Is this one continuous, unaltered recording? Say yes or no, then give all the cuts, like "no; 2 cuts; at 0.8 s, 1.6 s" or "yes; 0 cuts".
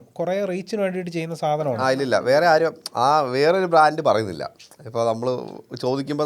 no; 1 cut; at 1.8 s